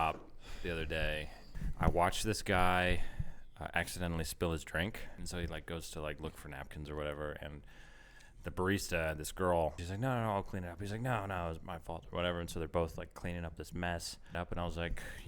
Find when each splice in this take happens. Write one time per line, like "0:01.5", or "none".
0:01.5
0:05.2
0:09.8
0:14.3